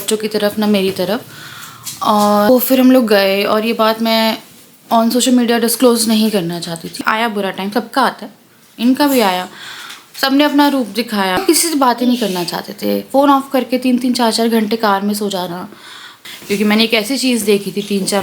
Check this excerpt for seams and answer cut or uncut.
cut